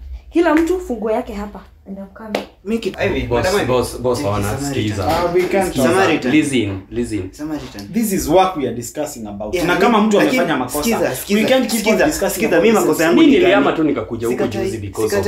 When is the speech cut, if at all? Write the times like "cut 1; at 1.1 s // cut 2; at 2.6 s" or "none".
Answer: cut 1; at 2.9 s

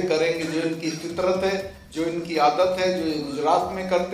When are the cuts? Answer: cut 1; at 1.8 s

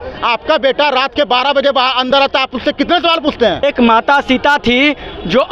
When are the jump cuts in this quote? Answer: cut 1; at 3.6 s

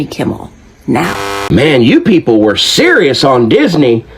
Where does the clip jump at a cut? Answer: cut 1; at 1.3 s

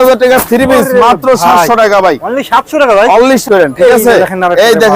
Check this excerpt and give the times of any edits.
cut 1; at 3.4 s

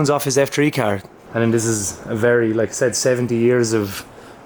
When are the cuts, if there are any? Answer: cut 1; at 1.2 s

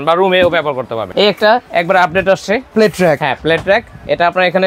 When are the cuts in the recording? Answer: cut 1; at 1.0 s // cut 2; at 2.7 s

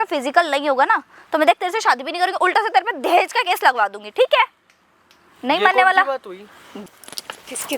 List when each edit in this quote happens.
cut 1; at 6.8 s

